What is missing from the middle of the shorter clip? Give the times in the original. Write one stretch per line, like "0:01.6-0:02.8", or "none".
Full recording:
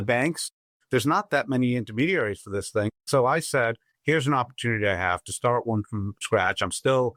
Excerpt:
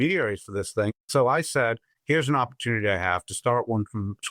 none